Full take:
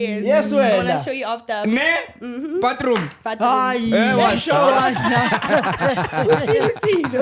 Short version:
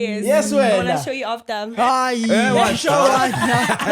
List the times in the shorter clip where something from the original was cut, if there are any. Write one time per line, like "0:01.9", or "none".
0:01.6